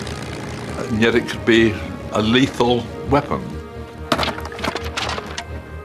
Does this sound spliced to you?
no; 0 cuts

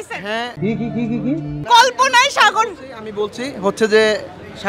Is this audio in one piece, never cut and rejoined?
yes; 0 cuts

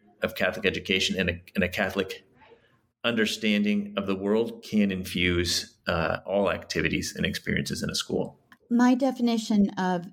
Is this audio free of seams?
no; 1 cut; at 8.5 s

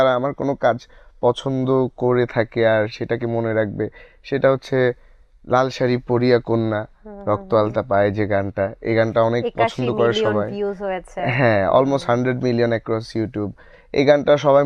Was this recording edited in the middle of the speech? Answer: no; 0 cuts

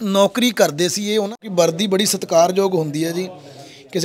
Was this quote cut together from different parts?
yes; 1 cut; at 1.4 s

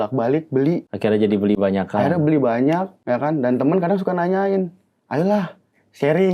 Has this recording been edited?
yes; 2 cuts; at 0.9 s, 2.9 s

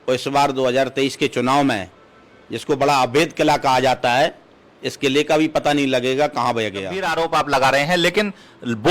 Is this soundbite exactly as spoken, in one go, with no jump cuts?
no; 1 cut; at 7.0 s

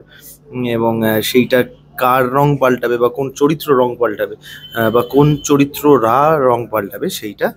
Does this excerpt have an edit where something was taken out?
no; 0 cuts

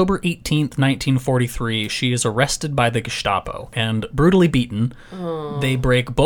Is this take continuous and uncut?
no; 1 cut; at 3.7 s

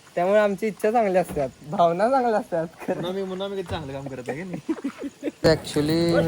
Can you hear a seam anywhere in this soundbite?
yes; 1 cut; at 5.3 s

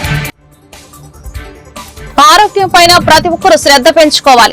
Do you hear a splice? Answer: no; 0 cuts

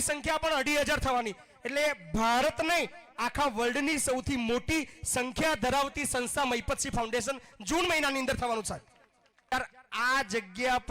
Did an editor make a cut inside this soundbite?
yes; 1 cut; at 9.5 s

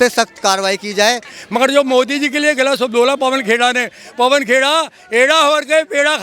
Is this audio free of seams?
no; 1 cut; at 1.4 s

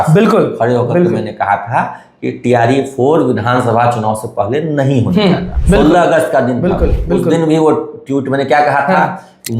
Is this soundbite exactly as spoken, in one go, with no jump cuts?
no; 1 cut; at 5.5 s

